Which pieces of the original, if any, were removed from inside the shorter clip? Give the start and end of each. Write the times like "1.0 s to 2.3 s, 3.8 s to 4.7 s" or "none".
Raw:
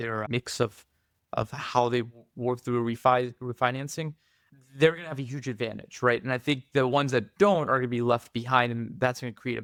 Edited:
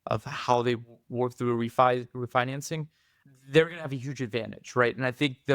none